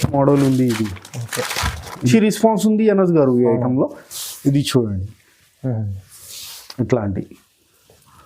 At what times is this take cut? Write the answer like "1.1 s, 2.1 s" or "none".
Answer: 2.1 s